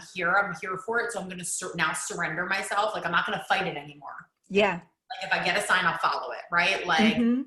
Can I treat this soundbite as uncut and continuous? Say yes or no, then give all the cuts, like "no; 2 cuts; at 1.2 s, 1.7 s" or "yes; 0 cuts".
yes; 0 cuts